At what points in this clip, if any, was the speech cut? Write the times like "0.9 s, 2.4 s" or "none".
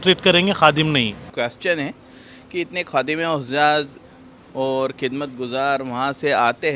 1.2 s